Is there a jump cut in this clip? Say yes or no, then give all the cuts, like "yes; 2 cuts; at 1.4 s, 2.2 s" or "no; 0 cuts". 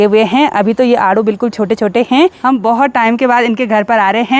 yes; 1 cut; at 2.4 s